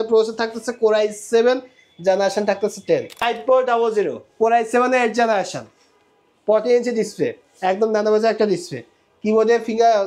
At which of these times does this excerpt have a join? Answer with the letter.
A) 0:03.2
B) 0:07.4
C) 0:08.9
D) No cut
A